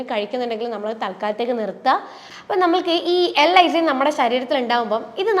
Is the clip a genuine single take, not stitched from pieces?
no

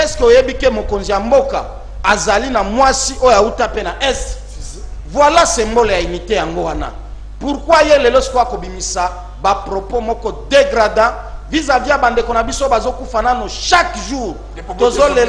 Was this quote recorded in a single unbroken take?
yes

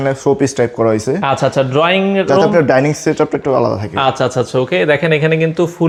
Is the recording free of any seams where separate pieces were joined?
yes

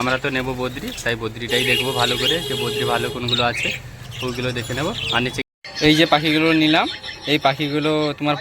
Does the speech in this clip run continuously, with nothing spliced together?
no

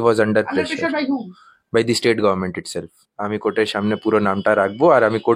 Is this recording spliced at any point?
yes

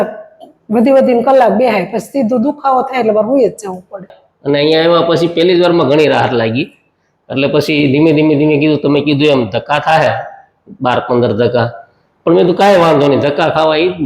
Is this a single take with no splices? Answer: no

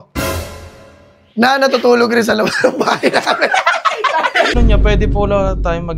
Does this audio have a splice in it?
yes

